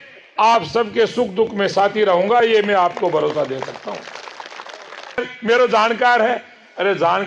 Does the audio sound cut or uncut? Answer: cut